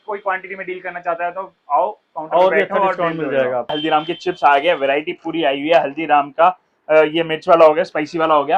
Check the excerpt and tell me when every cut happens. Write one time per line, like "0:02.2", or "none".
0:03.8